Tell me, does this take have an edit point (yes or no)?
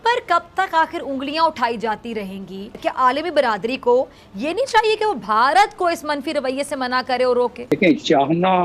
yes